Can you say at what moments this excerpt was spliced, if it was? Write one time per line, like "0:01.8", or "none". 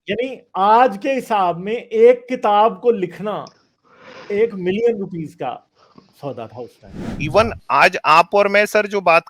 0:07.0